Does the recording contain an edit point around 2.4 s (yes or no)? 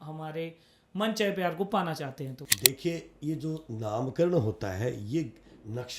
yes